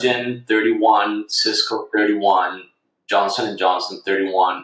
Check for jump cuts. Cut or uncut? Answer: uncut